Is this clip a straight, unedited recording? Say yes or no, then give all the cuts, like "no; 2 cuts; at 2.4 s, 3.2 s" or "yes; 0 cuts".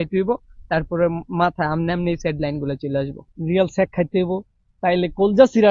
no; 1 cut; at 3.3 s